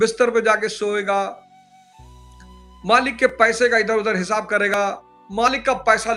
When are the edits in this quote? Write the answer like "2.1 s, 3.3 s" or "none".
none